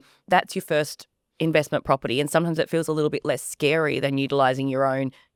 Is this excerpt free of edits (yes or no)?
yes